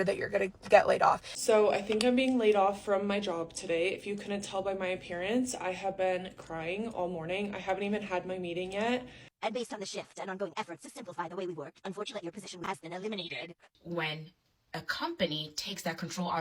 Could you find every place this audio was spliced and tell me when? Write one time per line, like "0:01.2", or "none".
0:01.3
0:09.2
0:13.7